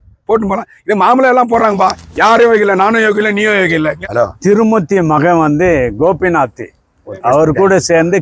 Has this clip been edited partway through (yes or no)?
yes